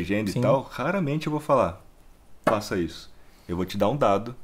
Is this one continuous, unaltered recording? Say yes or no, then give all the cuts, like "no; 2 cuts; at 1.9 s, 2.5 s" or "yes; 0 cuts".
yes; 0 cuts